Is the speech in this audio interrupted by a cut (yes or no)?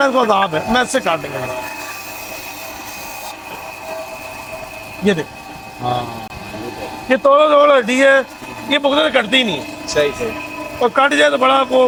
no